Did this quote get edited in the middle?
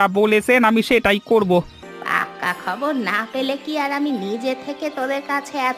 yes; 1 cut; at 1.8 s

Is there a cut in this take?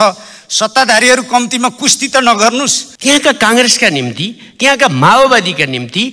yes; 1 cut; at 2.8 s

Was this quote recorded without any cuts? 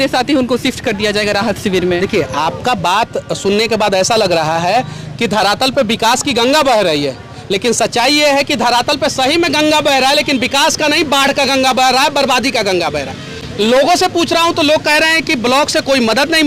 yes; 0 cuts

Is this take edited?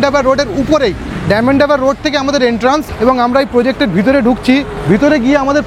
no; 0 cuts

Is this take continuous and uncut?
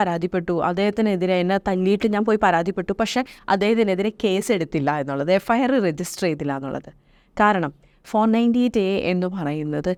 yes; 0 cuts

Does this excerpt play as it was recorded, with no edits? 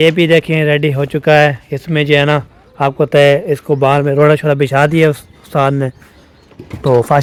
yes; 0 cuts

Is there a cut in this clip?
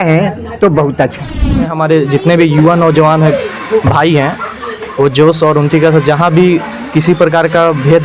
yes; 1 cut; at 1.7 s

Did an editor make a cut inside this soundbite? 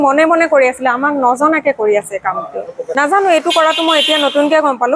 yes; 1 cut; at 2.8 s

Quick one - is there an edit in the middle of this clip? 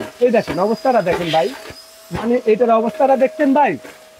no; 0 cuts

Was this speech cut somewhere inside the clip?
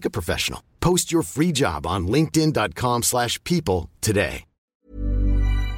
yes; 1 cut; at 4.7 s

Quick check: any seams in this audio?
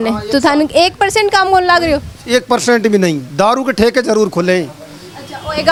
no; 0 cuts

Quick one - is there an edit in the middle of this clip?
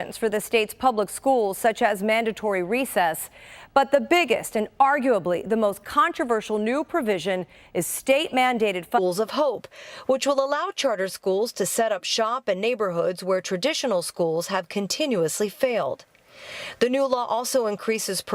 no; 0 cuts

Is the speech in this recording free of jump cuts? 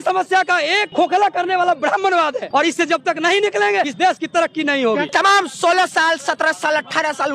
no; 4 cuts; at 0.9 s, 2.4 s, 3.9 s, 5.1 s

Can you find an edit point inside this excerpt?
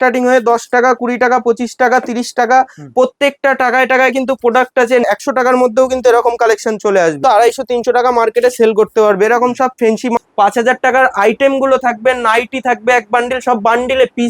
yes; 3 cuts; at 5.1 s, 7.2 s, 10.2 s

